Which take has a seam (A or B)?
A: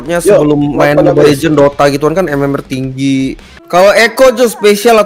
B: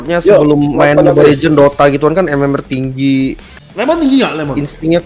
A